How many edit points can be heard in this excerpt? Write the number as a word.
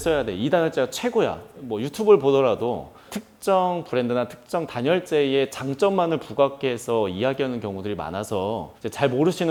zero